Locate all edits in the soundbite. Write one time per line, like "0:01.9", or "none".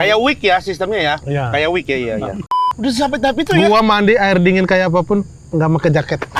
0:02.6